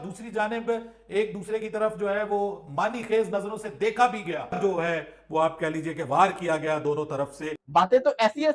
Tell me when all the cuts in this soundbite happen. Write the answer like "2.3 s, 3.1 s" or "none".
4.6 s, 7.6 s